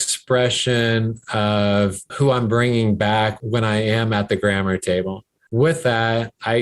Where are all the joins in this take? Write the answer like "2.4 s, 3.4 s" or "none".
5.4 s